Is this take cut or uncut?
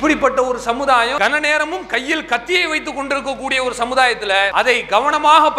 cut